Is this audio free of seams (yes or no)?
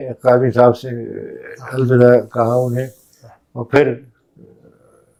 yes